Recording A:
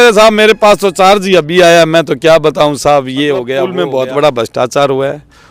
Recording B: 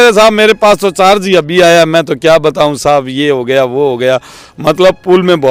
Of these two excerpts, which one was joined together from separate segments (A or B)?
A